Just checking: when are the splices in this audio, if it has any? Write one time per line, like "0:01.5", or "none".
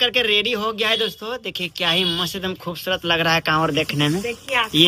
none